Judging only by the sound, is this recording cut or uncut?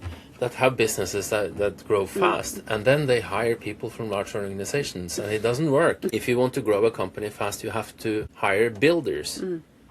cut